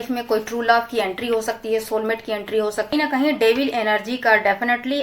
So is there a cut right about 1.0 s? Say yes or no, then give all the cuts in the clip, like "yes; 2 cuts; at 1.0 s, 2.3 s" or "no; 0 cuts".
no; 1 cut; at 2.9 s